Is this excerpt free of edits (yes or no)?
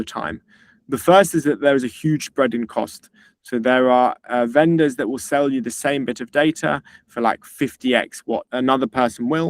no